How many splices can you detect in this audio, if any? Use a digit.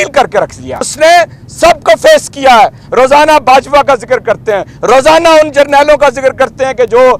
1